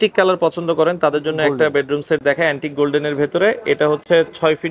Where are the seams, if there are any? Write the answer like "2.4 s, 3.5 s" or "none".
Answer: none